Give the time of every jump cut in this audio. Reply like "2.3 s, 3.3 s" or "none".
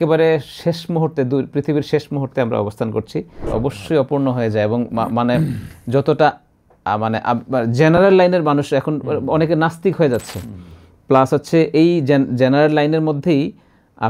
3.4 s